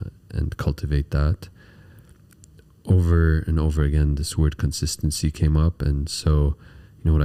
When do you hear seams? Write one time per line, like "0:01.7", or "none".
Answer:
none